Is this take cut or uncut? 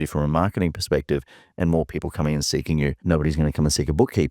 cut